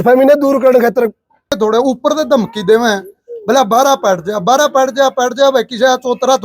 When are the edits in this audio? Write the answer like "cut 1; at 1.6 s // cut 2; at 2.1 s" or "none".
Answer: cut 1; at 1.5 s